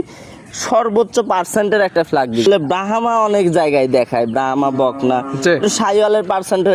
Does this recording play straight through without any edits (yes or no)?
no